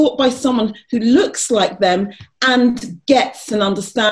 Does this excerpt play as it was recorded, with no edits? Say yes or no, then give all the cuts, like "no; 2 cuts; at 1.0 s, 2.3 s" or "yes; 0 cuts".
yes; 0 cuts